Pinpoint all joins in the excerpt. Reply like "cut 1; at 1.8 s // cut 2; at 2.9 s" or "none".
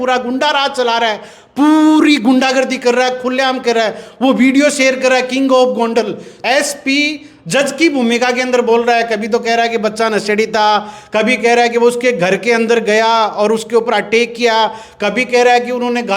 cut 1; at 6.3 s